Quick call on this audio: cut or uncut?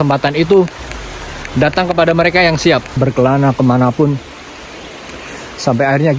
cut